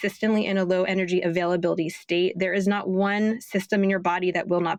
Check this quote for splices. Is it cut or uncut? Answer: uncut